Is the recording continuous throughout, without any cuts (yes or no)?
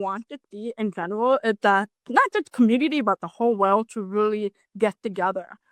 no